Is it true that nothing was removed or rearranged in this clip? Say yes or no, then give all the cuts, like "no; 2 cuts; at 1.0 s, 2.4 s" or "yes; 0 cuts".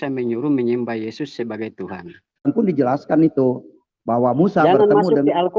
no; 1 cut; at 2.5 s